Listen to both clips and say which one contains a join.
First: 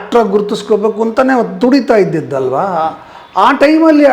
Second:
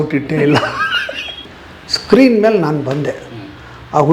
second; 1 cut; at 1.5 s

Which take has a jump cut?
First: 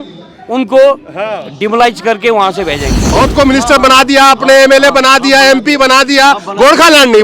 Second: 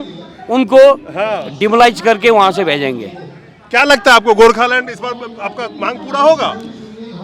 first; 1 cut; at 3.0 s

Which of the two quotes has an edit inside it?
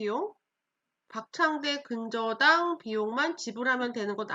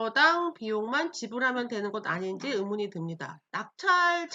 second; 1 cut; at 3.4 s

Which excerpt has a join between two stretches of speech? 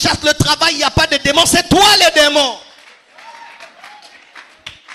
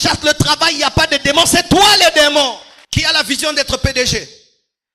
second; 1 cut; at 2.7 s

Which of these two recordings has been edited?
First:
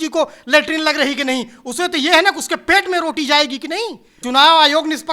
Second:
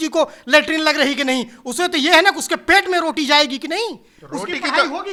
first; 1 cut; at 4.1 s

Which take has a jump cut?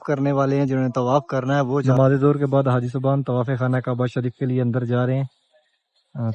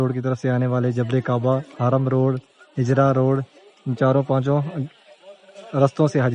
first; 1 cut; at 1.9 s

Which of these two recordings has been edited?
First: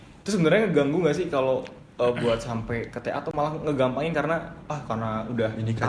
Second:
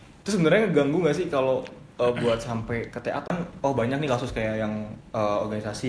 second; 1 cut; at 3.3 s

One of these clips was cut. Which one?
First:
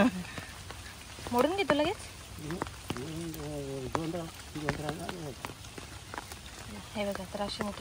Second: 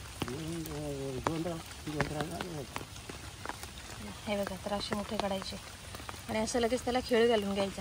first; 1 cut; at 1.2 s

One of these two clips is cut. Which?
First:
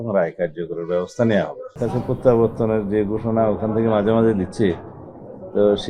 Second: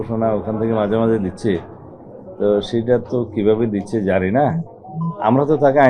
first; 1 cut; at 1.6 s

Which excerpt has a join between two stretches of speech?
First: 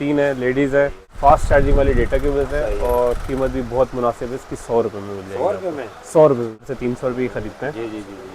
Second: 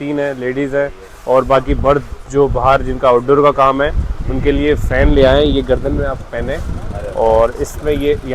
first; 2 cuts; at 1.1 s, 6.6 s

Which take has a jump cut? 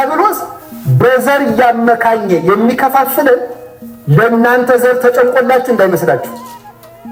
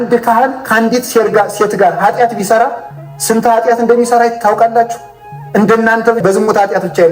second; 1 cut; at 6.2 s

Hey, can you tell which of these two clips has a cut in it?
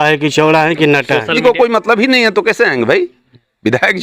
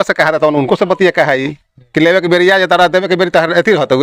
first; 1 cut; at 1.3 s

